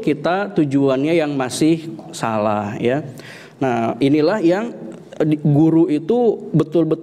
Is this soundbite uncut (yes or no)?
yes